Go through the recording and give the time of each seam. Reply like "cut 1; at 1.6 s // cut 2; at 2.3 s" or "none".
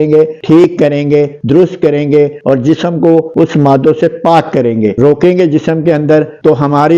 cut 1; at 4.9 s